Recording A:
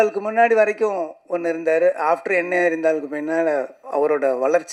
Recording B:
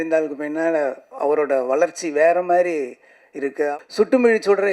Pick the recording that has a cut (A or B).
B